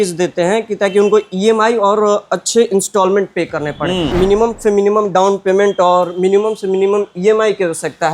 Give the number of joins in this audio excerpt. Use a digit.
1